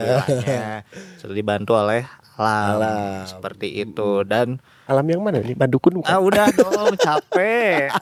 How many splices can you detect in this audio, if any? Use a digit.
0